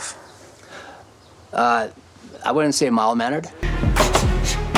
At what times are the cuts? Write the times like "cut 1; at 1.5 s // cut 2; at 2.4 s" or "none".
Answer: cut 1; at 3.6 s